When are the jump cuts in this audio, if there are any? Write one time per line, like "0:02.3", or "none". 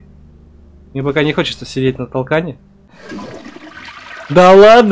0:03.0